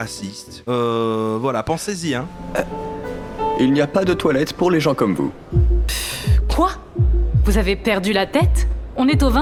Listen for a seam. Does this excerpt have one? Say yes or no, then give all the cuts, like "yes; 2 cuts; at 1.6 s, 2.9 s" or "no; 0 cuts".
no; 0 cuts